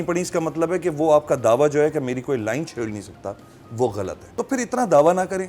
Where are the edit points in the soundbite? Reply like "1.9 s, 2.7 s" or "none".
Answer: 4.2 s